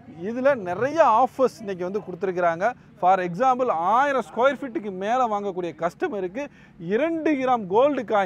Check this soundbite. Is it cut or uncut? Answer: uncut